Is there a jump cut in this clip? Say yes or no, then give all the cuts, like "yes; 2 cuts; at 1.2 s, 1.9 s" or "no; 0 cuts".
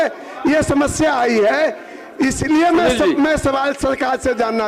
no; 0 cuts